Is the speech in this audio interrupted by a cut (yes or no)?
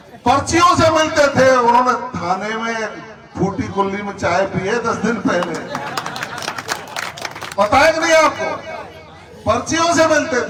no